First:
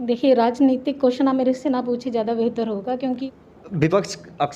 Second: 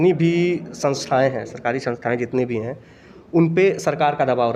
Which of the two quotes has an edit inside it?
first; 1 cut; at 3.2 s

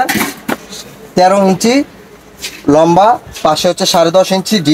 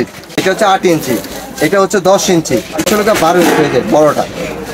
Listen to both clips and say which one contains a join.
second; 1 cut; at 2.9 s

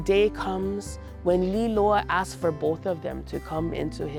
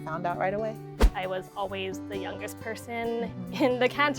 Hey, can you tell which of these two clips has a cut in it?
second; 1 cut; at 1.0 s

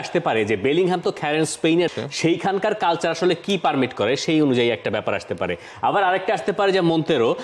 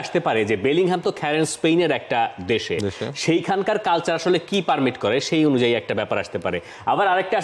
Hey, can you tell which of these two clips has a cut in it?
first; 1 cut; at 1.9 s

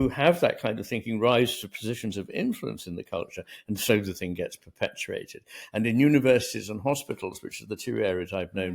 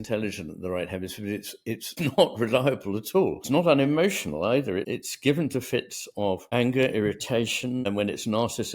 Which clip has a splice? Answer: second; 5 cuts; at 1.9 s, 3.4 s, 4.9 s, 6.4 s, 7.9 s

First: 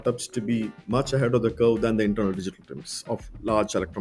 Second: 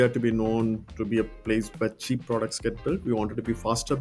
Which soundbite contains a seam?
second; 1 cut; at 0.9 s

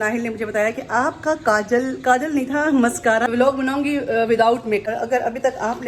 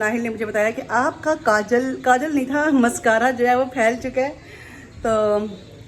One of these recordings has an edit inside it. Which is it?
first; 2 cuts; at 3.3 s, 4.8 s

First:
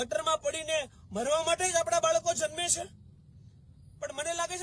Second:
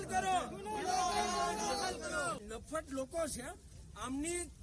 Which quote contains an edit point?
second; 1 cut; at 2.5 s

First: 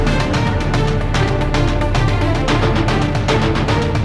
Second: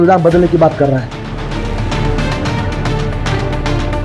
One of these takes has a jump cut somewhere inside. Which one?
second; 1 cut; at 1.1 s

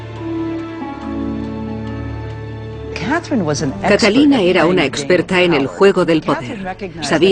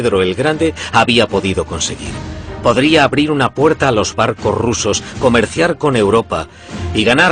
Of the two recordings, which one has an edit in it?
first; 1 cut; at 5.0 s

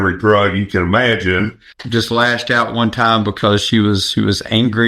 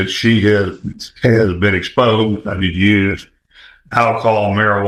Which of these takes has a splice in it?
first; 1 cut; at 1.6 s

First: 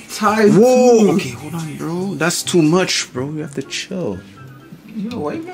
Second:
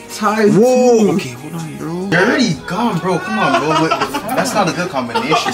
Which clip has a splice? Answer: second; 1 cut; at 2.1 s

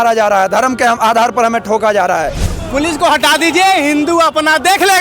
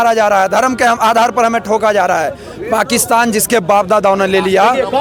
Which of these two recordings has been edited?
first; 1 cut; at 2.5 s

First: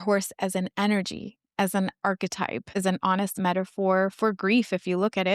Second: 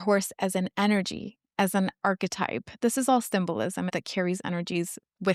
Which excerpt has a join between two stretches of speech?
first; 1 cut; at 2.7 s

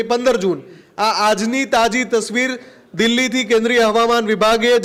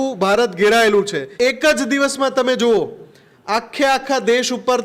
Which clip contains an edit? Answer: second; 1 cut; at 1.2 s

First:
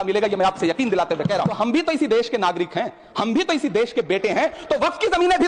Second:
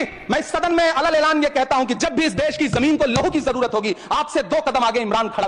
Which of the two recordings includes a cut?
first; 1 cut; at 1.5 s

